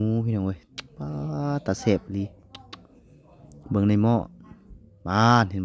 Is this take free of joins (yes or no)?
yes